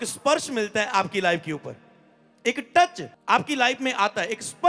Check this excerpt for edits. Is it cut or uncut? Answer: cut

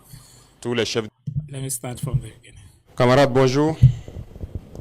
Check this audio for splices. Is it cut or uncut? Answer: cut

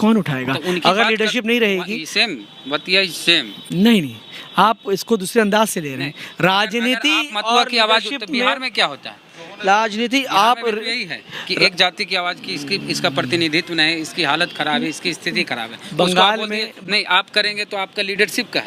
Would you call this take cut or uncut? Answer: uncut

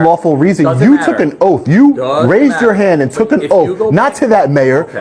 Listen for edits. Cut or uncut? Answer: uncut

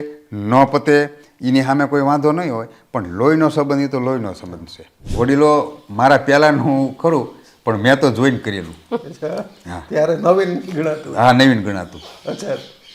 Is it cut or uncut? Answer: cut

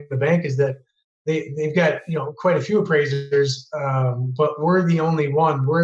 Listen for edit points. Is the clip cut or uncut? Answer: uncut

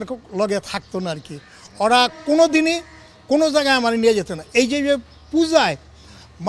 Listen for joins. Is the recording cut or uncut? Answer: uncut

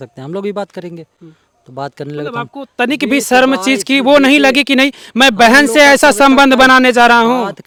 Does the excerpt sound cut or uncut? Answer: uncut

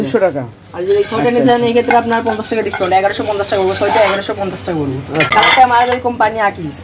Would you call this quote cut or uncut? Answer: cut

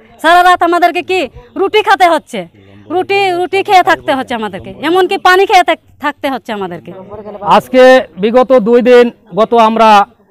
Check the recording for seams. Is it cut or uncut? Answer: uncut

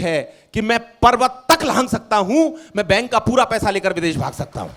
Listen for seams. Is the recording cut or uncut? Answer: uncut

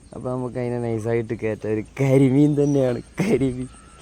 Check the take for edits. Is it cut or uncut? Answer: uncut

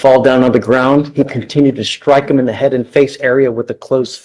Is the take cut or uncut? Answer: uncut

